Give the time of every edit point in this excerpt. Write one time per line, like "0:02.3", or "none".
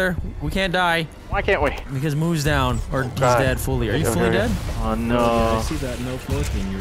0:01.2
0:04.6